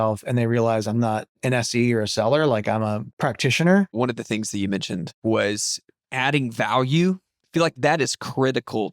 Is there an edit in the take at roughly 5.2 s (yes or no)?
yes